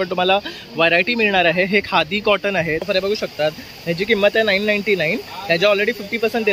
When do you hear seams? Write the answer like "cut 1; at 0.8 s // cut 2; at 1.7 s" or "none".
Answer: cut 1; at 2.9 s